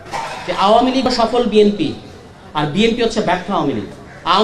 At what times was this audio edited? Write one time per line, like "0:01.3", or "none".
0:01.1